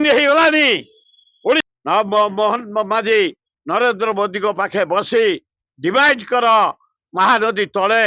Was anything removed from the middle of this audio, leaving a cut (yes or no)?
yes